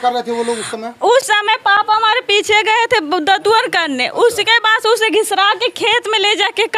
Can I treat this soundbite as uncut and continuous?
yes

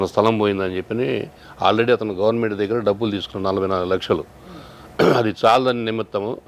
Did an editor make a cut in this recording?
no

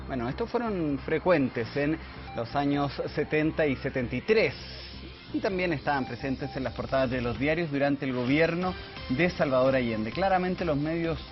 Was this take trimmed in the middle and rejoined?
no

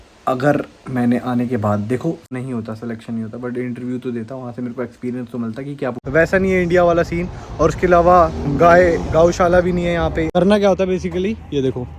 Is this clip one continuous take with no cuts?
no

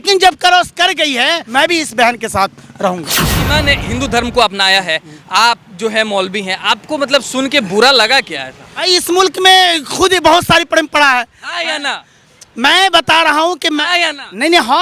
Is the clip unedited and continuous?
no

